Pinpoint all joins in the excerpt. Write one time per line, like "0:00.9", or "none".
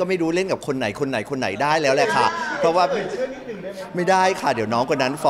none